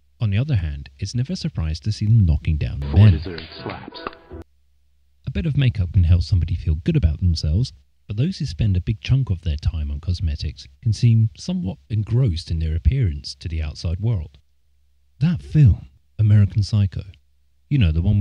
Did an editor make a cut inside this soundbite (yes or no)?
no